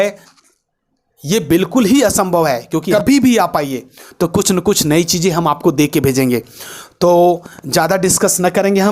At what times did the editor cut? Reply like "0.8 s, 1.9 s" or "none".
2.9 s

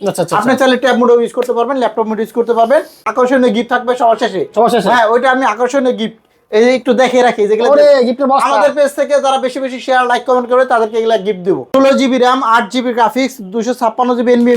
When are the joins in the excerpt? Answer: 3.0 s, 11.6 s

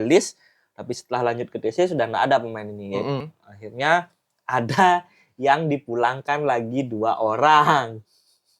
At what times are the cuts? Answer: 3.2 s

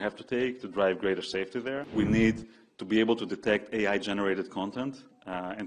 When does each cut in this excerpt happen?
1.9 s

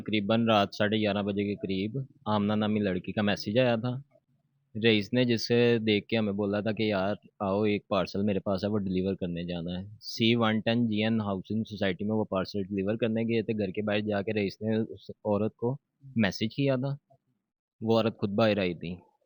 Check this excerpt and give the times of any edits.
none

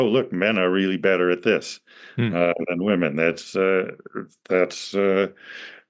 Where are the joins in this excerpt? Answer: none

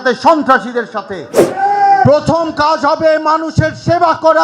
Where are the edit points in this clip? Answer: 1.4 s

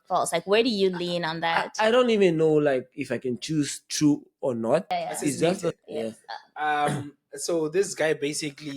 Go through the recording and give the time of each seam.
5.8 s

